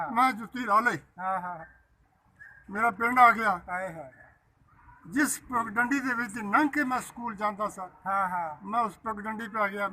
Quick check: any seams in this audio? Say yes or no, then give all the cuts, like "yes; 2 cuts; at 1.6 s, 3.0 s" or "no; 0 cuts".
no; 0 cuts